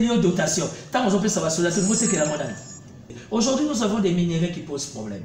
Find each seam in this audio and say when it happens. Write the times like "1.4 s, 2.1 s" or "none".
3.2 s